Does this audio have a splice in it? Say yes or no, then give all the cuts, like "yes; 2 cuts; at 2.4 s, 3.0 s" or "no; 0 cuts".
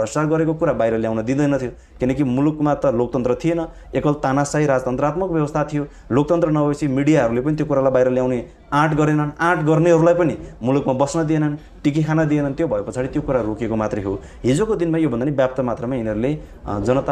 no; 0 cuts